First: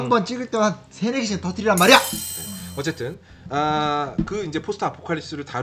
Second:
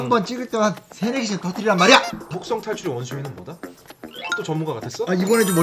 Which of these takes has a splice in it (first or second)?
second